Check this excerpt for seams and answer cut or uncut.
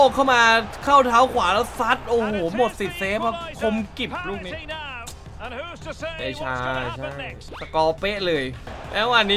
uncut